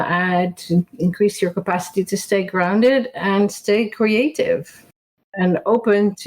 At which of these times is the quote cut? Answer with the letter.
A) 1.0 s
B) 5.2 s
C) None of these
B